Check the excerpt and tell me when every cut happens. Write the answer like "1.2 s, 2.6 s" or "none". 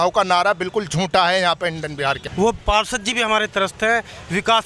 2.2 s